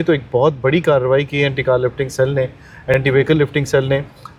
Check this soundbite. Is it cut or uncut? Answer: uncut